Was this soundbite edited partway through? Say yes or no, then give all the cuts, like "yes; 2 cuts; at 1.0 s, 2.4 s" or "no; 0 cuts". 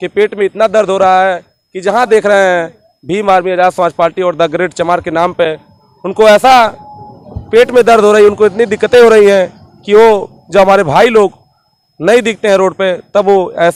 no; 0 cuts